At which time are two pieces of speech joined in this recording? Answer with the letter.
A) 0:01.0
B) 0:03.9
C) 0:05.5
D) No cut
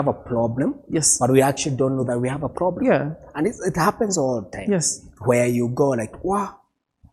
D